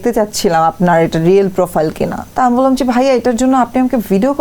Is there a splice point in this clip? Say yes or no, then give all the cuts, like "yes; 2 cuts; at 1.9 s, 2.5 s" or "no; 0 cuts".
no; 0 cuts